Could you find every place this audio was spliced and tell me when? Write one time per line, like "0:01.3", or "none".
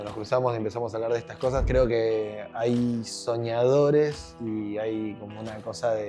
0:01.7